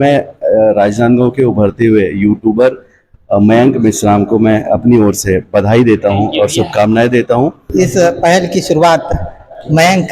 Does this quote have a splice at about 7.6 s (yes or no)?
yes